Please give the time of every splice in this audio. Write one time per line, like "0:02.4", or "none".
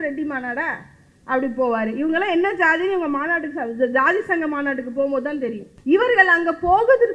0:05.7